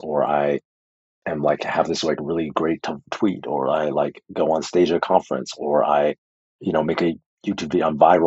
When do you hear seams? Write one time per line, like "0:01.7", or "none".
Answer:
none